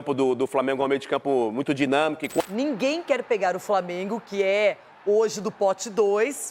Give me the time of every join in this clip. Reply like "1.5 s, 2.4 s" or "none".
2.4 s